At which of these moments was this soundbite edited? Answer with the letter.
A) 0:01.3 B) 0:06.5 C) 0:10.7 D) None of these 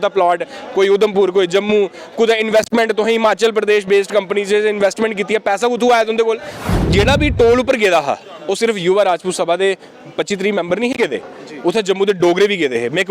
B